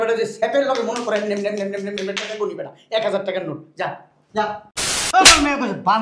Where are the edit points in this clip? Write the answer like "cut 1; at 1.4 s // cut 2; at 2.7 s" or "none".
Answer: cut 1; at 4.9 s